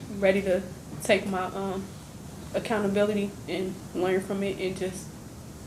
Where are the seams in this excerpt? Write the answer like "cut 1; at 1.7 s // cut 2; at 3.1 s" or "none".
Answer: none